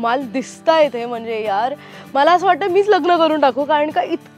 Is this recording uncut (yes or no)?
yes